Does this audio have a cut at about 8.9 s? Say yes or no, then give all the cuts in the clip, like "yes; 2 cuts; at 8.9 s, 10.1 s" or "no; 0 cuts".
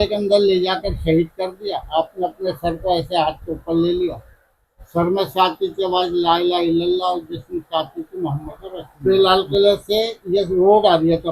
yes; 1 cut; at 8.9 s